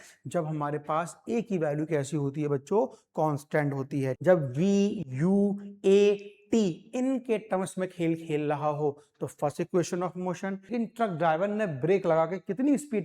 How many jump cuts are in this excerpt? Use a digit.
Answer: 2